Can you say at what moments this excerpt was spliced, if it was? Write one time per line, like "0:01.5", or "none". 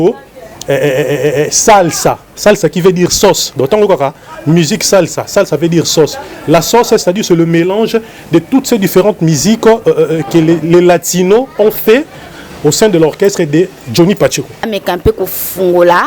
0:14.7